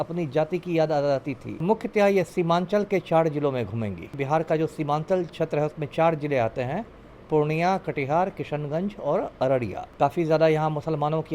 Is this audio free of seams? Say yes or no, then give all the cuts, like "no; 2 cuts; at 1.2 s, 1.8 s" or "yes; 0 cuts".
no; 3 cuts; at 1.6 s, 4.2 s, 9.8 s